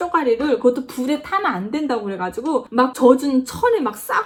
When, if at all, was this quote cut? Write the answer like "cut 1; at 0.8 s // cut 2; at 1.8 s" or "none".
none